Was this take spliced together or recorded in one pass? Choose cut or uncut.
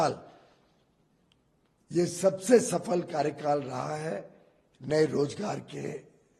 uncut